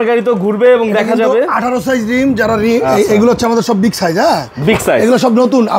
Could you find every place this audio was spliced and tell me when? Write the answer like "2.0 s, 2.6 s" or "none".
none